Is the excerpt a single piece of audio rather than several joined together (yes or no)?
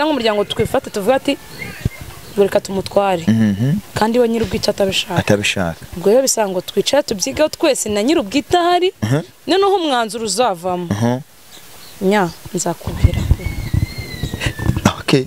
yes